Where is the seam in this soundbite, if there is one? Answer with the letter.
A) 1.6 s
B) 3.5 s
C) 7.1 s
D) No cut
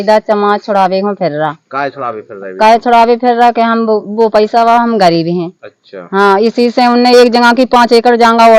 D